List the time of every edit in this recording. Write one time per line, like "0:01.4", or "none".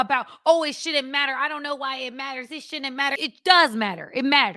0:03.2